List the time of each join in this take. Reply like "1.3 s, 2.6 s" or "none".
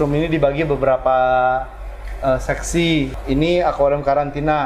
3.2 s